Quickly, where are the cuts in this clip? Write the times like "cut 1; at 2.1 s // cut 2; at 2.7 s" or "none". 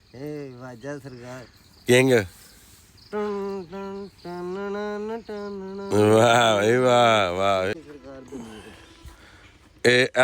cut 1; at 7.7 s